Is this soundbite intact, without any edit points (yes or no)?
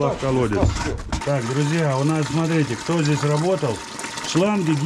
no